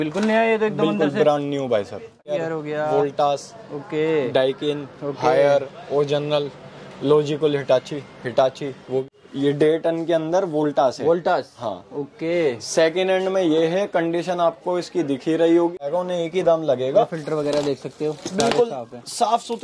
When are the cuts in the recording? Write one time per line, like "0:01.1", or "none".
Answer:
0:02.4
0:09.0
0:15.8